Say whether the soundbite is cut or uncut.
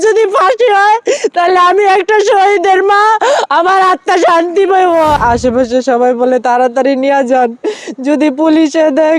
cut